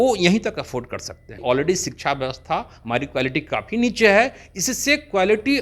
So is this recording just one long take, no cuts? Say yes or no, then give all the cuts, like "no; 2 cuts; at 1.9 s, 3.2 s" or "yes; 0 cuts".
no; 1 cut; at 1.4 s